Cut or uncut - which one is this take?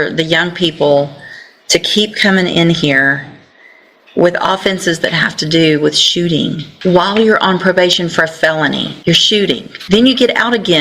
cut